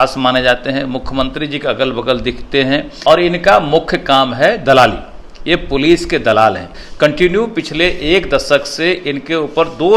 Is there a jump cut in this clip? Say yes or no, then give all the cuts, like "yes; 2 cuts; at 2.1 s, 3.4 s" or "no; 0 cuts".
yes; 2 cuts; at 2.9 s, 6.7 s